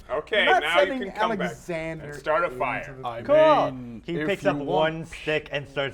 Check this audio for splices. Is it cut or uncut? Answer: uncut